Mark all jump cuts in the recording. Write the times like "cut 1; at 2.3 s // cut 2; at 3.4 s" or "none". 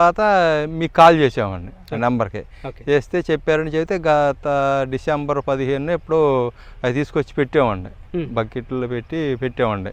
none